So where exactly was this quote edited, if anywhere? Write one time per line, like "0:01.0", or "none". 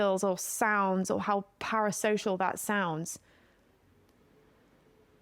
none